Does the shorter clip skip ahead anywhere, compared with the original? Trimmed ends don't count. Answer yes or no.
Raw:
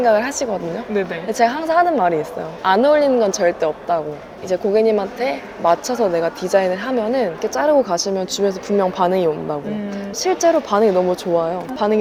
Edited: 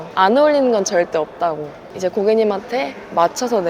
no